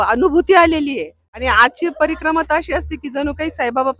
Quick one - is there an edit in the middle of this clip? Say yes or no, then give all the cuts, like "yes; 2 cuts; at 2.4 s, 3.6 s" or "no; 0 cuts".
yes; 1 cut; at 1.4 s